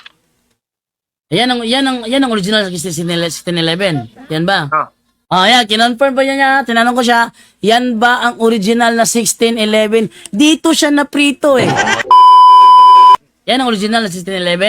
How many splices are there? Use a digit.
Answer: 2